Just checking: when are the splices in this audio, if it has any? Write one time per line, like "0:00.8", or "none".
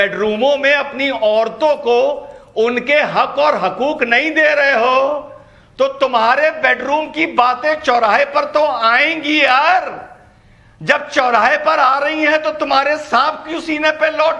none